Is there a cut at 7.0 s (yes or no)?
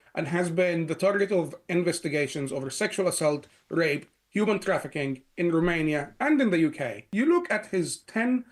yes